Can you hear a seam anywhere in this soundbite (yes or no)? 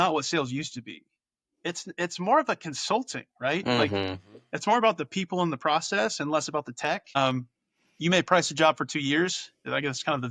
yes